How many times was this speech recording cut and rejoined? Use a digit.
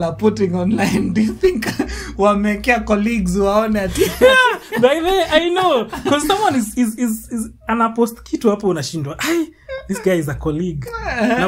0